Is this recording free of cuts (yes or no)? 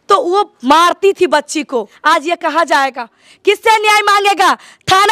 no